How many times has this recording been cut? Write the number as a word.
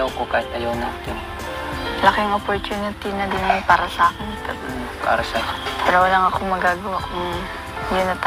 zero